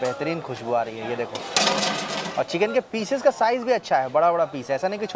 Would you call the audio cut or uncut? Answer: uncut